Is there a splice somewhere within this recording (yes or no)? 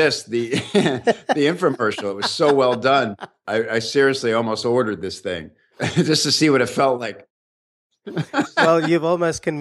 no